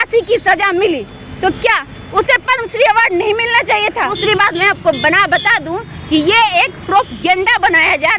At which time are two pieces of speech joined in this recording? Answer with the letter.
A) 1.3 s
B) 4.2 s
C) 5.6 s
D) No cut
B